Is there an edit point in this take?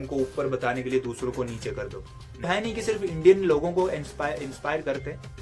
yes; 1 cut; at 2.5 s

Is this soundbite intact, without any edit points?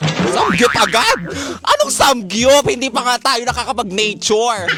yes; 0 cuts

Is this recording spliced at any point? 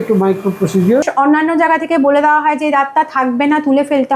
yes; 1 cut; at 1.1 s

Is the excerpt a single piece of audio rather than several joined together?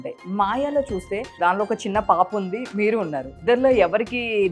no; 2 cuts; at 1.3 s, 3.4 s

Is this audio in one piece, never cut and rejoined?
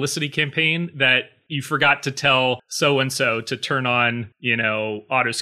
no; 3 cuts; at 1.4 s, 2.7 s, 4.3 s

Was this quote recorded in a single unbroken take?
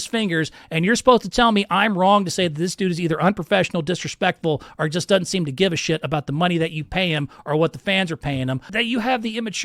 no; 1 cut; at 8.7 s

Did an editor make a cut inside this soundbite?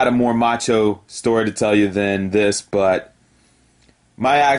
no; 0 cuts

